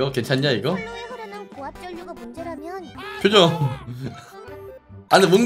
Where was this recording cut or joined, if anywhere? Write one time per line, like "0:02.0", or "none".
0:02.9